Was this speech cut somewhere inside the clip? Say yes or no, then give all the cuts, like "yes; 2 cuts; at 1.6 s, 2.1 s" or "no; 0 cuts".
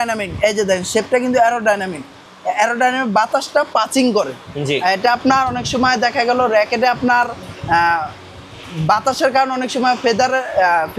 no; 0 cuts